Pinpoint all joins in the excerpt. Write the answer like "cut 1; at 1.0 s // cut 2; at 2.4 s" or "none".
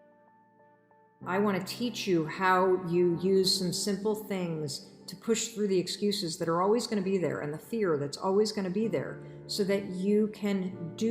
cut 1; at 1.2 s